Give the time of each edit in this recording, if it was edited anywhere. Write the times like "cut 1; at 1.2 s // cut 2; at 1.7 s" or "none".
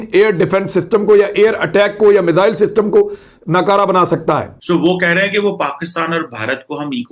cut 1; at 4.5 s